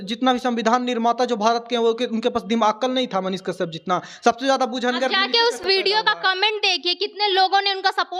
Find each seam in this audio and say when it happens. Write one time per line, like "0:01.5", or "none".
none